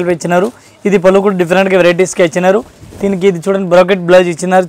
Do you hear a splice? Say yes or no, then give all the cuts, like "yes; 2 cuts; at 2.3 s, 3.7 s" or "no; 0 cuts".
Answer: no; 0 cuts